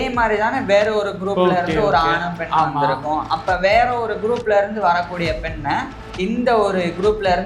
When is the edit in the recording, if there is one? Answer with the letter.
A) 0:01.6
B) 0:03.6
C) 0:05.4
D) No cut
D